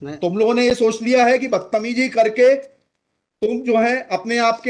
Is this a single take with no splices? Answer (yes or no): yes